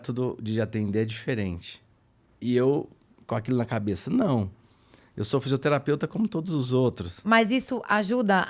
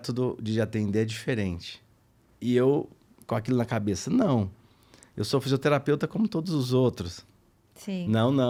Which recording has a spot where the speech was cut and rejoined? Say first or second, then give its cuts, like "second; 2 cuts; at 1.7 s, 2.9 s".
first; 1 cut; at 7.1 s